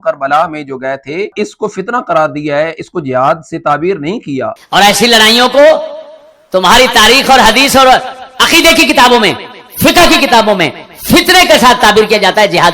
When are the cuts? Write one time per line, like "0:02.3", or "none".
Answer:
0:01.3
0:04.6